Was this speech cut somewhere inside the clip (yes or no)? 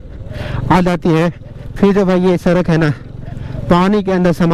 no